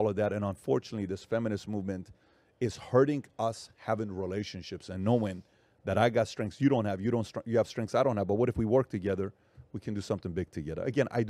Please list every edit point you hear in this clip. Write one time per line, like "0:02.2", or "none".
0:08.8